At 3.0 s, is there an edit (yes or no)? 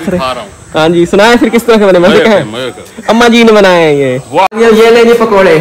no